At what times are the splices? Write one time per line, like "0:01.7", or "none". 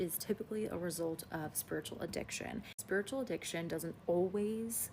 0:02.8